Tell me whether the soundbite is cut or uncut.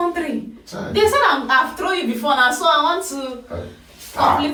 uncut